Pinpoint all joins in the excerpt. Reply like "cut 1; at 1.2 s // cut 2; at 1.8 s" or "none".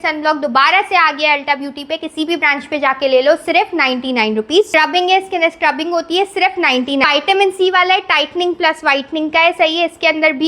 cut 1; at 4.7 s // cut 2; at 7.0 s